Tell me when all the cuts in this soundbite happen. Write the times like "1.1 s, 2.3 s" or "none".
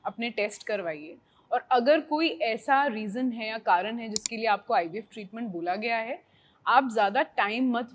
none